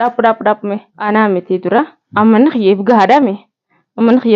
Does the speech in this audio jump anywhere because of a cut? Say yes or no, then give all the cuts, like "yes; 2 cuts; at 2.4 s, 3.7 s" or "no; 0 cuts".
yes; 1 cut; at 0.9 s